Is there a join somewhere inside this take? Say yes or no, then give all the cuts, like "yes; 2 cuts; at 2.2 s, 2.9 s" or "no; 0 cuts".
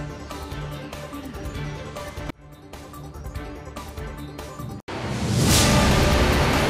no; 0 cuts